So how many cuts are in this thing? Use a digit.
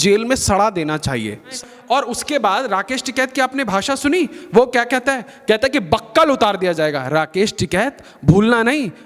1